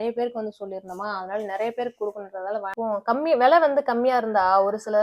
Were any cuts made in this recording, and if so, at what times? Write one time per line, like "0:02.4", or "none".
0:02.7